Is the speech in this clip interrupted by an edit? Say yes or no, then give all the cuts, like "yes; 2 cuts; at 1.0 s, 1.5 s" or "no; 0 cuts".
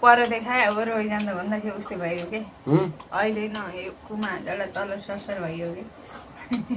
no; 0 cuts